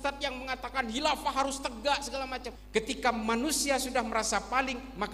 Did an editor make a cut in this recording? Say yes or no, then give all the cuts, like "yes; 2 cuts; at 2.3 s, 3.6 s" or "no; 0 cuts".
yes; 1 cut; at 2.5 s